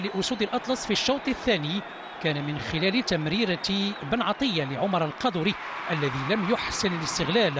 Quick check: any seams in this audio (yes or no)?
no